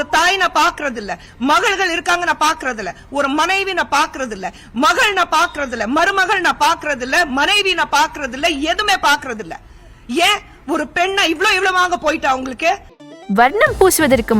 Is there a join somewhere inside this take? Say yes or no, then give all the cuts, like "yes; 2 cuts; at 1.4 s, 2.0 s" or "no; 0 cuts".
yes; 1 cut; at 12.9 s